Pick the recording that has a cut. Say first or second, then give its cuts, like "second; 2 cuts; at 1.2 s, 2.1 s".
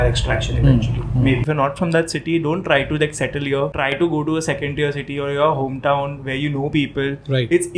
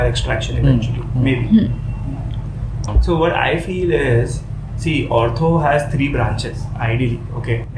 first; 2 cuts; at 1.4 s, 3.7 s